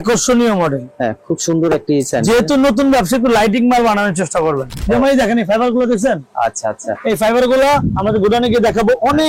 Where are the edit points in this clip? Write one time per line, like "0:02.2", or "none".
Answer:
0:04.7